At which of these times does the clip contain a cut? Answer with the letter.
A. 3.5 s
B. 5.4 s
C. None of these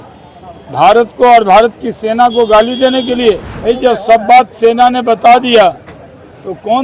A